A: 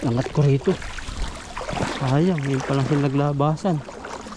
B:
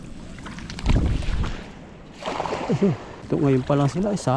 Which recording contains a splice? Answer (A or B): B